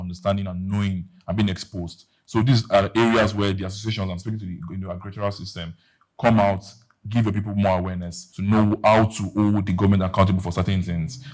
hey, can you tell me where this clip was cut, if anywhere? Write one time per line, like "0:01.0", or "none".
none